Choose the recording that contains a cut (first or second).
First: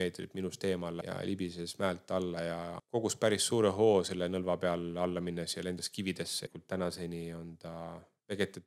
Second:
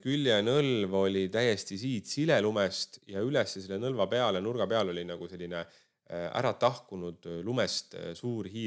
first